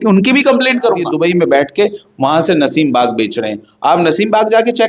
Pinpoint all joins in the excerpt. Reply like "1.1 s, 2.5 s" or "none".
1.1 s